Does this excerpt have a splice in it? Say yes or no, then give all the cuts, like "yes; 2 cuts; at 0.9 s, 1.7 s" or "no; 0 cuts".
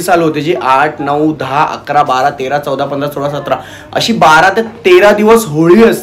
no; 0 cuts